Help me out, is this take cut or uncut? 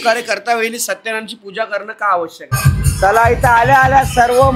cut